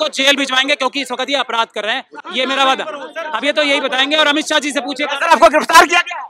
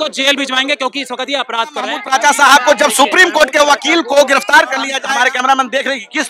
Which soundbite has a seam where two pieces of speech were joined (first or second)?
second